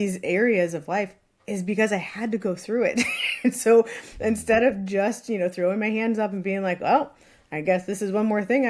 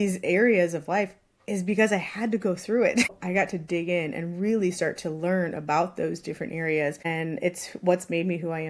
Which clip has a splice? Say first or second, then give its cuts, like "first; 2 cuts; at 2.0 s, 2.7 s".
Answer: second; 2 cuts; at 3.2 s, 7.0 s